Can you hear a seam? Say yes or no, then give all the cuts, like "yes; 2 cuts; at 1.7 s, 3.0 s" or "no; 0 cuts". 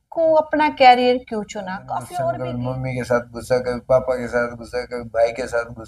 yes; 1 cut; at 2.5 s